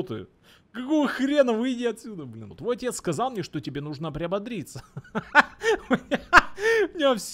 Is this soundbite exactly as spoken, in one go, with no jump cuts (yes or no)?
no